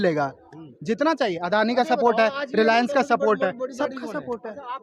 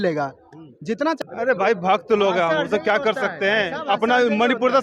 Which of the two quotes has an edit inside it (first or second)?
second